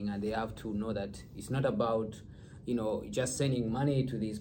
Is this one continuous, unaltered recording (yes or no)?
yes